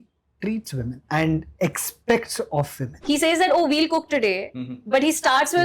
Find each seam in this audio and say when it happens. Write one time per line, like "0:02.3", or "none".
0:01.0
0:02.8